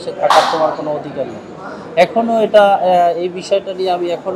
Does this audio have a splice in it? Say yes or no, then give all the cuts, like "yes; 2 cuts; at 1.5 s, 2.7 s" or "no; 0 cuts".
no; 0 cuts